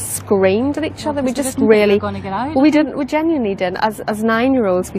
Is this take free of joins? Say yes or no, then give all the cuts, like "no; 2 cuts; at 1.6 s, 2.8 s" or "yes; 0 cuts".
yes; 0 cuts